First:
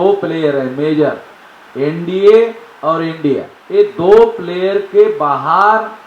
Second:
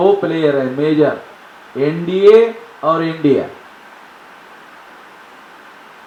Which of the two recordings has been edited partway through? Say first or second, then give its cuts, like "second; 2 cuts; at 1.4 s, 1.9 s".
first; 1 cut; at 3.5 s